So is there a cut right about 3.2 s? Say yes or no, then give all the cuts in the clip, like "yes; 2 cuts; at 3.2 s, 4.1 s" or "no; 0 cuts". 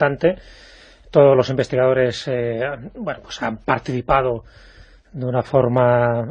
no; 1 cut; at 4.5 s